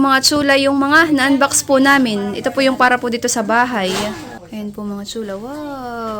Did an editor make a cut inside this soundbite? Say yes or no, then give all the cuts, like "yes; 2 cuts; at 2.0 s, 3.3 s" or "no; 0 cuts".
yes; 1 cut; at 4.8 s